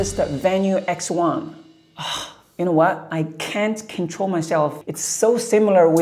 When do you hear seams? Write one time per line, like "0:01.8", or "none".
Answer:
0:03.0
0:04.8